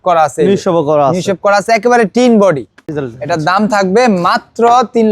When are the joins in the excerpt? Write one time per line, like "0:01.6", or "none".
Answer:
0:03.0